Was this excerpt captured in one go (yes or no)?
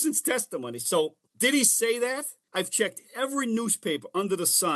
no